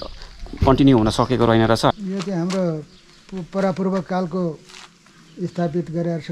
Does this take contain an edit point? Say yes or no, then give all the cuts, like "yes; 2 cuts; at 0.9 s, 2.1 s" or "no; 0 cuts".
yes; 1 cut; at 1.9 s